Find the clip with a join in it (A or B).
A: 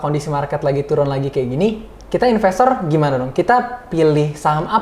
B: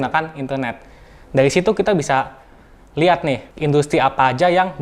B